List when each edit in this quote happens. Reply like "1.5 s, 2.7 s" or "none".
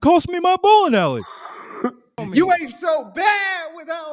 2.2 s